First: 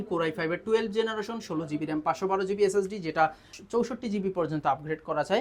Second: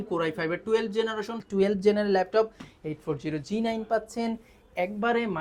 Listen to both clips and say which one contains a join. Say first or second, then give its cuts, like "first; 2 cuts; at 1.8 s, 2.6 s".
second; 1 cut; at 1.4 s